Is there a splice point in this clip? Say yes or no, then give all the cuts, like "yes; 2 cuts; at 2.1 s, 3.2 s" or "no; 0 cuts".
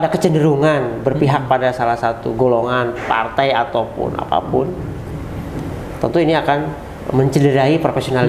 no; 0 cuts